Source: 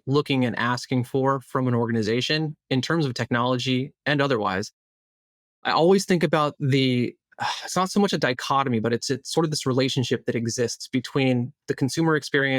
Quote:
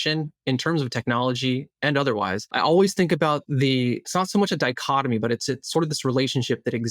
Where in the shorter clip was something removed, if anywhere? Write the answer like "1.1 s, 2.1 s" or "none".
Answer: 2.4 s, 4.0 s